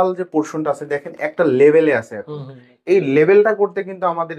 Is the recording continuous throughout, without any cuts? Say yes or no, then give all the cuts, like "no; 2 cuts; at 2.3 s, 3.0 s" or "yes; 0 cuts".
yes; 0 cuts